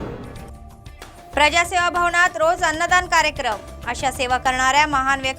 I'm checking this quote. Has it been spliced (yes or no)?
no